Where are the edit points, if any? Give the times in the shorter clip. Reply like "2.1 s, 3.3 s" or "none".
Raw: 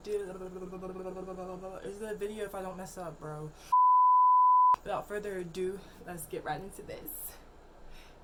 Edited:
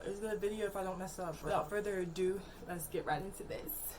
1.6 s